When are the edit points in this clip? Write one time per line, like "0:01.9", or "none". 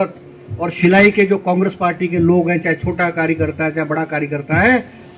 none

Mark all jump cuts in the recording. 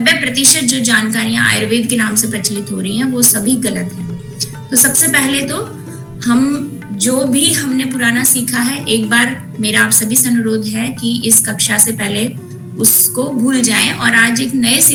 none

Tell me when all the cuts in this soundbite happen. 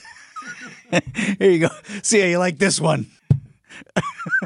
0:03.2

